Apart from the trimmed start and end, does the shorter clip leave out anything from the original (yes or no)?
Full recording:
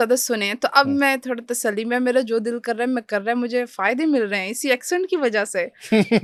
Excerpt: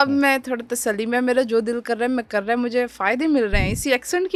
no